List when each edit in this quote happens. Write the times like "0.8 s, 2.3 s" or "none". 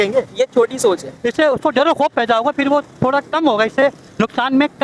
1.1 s